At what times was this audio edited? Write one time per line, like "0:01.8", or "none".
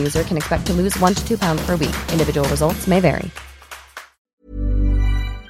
0:04.3